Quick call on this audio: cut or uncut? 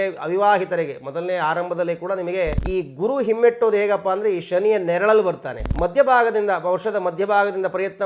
cut